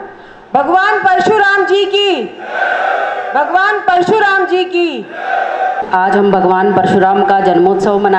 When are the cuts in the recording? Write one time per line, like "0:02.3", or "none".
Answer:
0:05.8